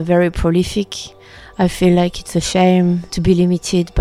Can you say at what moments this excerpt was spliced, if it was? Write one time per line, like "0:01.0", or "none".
0:03.1